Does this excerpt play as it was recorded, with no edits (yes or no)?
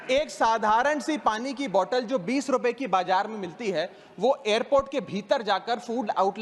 yes